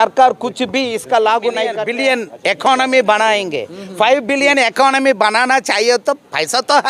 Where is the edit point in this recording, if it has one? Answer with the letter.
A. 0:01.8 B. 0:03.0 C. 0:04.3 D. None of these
A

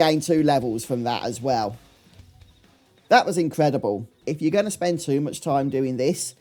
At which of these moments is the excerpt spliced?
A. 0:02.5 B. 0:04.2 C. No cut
B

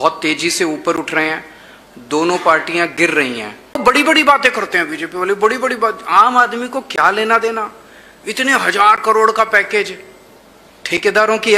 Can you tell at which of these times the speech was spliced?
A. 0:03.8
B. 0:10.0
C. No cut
A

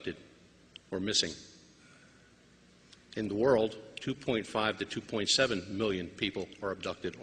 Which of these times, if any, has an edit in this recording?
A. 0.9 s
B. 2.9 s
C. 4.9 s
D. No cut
B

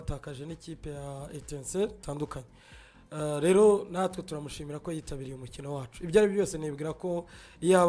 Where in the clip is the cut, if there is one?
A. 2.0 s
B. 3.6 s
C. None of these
A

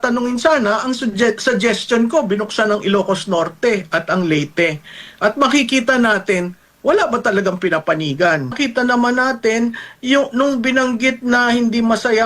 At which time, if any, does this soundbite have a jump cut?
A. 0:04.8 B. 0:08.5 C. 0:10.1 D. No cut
B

